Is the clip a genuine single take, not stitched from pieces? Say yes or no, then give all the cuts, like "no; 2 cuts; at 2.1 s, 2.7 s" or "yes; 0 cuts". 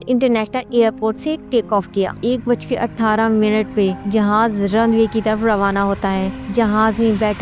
no; 2 cuts; at 2.1 s, 6.4 s